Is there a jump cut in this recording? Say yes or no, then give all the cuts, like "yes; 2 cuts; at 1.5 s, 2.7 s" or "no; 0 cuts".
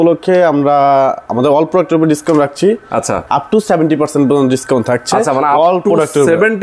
no; 0 cuts